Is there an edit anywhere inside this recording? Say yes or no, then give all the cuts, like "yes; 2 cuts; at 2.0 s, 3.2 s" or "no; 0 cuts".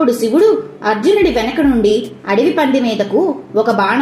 no; 0 cuts